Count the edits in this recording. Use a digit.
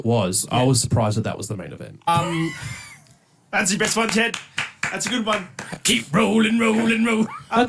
1